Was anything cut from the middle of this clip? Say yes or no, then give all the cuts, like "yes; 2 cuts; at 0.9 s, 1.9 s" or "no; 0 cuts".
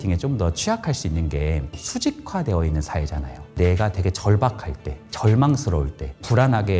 yes; 2 cuts; at 1.7 s, 3.5 s